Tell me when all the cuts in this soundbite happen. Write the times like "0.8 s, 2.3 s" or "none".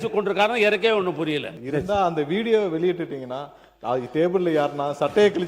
1.5 s